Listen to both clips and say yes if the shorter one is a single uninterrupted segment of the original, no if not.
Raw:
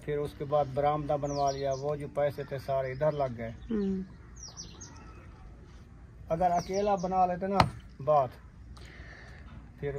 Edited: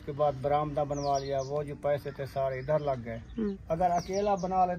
no